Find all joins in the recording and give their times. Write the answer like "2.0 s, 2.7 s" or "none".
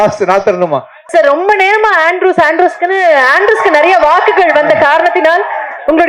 1.0 s